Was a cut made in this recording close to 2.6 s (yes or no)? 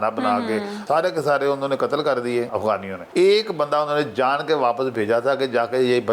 yes